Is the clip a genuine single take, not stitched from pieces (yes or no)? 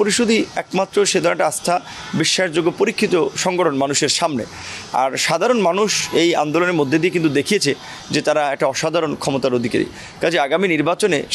yes